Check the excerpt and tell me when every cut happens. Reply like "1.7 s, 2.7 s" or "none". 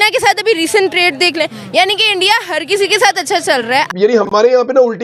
3.9 s